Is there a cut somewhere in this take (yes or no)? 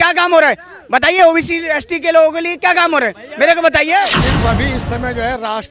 yes